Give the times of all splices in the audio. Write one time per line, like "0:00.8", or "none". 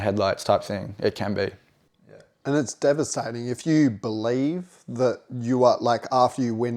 none